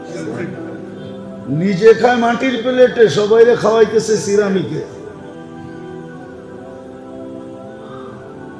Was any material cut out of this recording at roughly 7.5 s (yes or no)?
no